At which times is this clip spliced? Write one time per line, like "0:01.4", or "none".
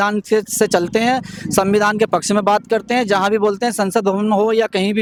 none